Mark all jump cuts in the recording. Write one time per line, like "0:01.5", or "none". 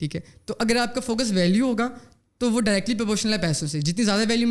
none